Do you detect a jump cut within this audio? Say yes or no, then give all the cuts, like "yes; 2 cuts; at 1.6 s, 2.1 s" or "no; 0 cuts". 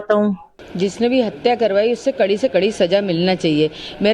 yes; 1 cut; at 1.6 s